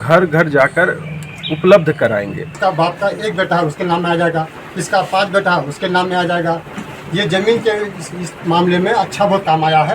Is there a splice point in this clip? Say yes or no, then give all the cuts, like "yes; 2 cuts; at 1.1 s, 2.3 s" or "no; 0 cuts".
yes; 1 cut; at 2.4 s